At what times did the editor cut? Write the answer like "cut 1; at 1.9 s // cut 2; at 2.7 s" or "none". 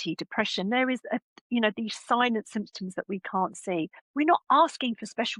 cut 1; at 4.0 s